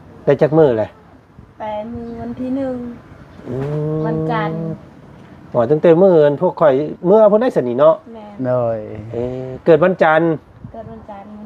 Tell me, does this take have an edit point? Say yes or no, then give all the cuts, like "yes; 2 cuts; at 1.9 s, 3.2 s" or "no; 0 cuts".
no; 0 cuts